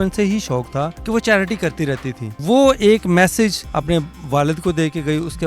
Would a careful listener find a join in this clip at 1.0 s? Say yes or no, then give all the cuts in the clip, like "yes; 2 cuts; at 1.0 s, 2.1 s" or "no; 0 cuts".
yes; 3 cuts; at 1.0 s, 2.4 s, 3.7 s